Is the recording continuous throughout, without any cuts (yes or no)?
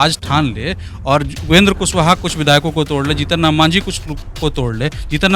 yes